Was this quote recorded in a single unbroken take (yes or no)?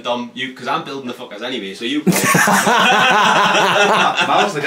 yes